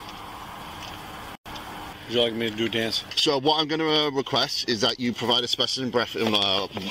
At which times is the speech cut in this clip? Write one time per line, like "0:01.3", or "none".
0:01.9
0:03.1